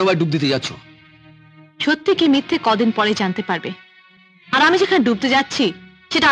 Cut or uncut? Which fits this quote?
uncut